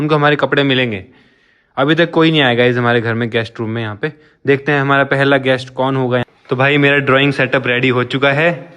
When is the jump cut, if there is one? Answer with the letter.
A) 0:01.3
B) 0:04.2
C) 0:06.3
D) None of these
C